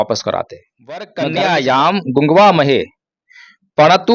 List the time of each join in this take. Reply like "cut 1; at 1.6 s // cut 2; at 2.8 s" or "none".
cut 1; at 1.1 s

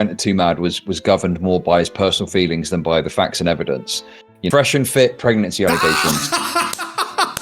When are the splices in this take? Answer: cut 1; at 4.5 s

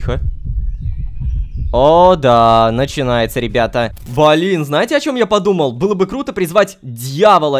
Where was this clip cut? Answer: cut 1; at 1.7 s // cut 2; at 4.0 s

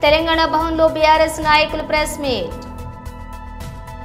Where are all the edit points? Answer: cut 1; at 2.5 s

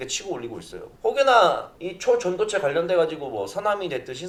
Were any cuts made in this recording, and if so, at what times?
none

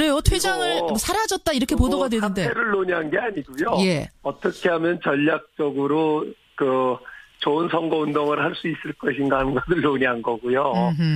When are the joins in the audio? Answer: cut 1; at 7.6 s

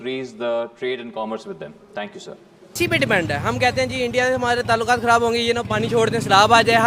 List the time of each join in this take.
cut 1; at 2.7 s

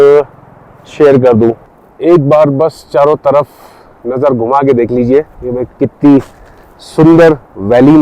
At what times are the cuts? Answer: cut 1; at 1.6 s

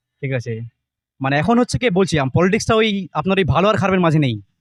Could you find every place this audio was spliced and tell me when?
none

